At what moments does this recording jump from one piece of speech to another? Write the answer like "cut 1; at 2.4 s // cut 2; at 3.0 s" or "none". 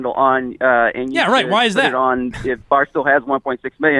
none